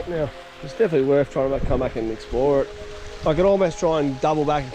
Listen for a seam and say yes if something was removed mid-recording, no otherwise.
no